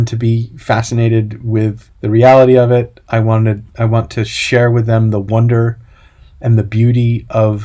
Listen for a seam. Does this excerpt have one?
yes; 1 cut; at 1.9 s

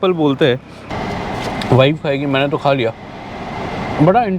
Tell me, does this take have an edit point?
yes; 1 cut; at 0.9 s

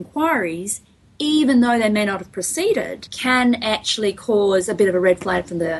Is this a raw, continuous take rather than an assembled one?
no; 1 cut; at 3.1 s

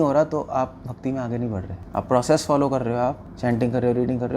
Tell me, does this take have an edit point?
yes; 2 cuts; at 1.8 s, 3.3 s

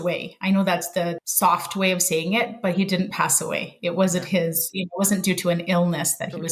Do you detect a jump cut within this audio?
yes; 1 cut; at 1.2 s

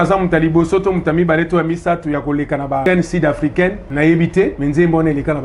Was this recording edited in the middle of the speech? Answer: yes; 3 cuts; at 2.9 s, 3.8 s, 4.6 s

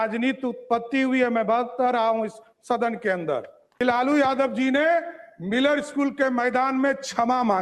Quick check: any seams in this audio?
yes; 1 cut; at 3.8 s

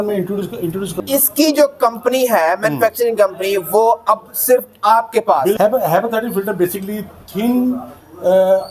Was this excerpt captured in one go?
no; 2 cuts; at 0.9 s, 5.6 s

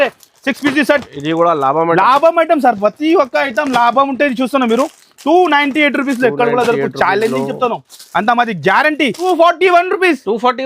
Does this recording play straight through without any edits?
no; 1 cut; at 9.2 s

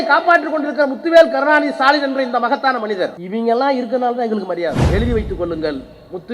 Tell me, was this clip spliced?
yes; 2 cuts; at 3.2 s, 4.8 s

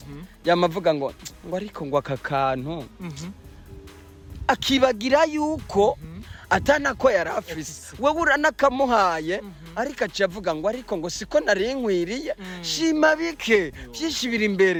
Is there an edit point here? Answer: no; 0 cuts

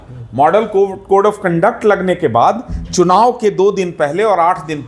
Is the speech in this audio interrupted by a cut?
no; 0 cuts

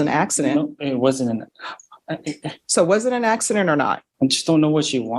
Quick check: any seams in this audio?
yes; 1 cut; at 4.1 s

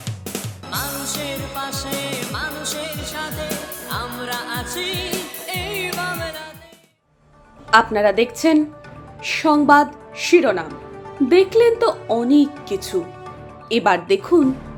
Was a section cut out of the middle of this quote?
no; 0 cuts

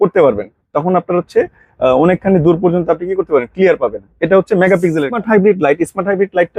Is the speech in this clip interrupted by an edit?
yes; 1 cut; at 5.1 s

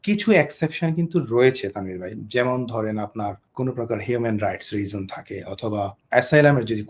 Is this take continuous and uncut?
no; 2 cuts; at 3.4 s, 6.0 s

